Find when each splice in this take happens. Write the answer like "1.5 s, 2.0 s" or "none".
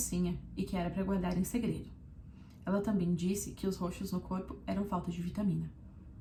none

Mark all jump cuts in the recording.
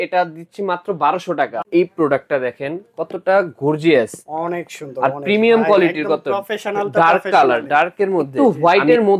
1.7 s, 8.3 s

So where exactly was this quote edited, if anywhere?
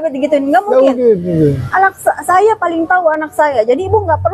none

